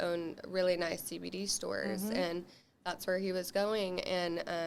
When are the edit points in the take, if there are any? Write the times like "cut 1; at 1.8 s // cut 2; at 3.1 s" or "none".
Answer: none